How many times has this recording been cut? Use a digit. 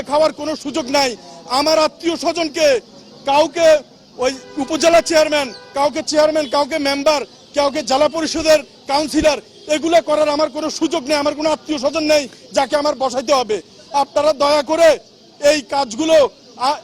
0